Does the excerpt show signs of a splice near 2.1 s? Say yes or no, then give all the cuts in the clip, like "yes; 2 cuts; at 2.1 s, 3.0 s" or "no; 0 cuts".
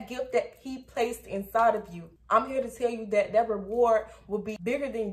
yes; 1 cut; at 2.1 s